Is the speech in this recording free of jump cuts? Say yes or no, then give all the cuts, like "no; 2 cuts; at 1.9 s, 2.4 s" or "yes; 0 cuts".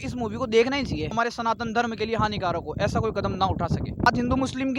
no; 2 cuts; at 1.1 s, 4.1 s